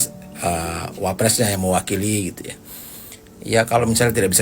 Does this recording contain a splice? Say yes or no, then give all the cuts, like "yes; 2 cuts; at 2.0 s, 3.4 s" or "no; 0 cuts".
no; 0 cuts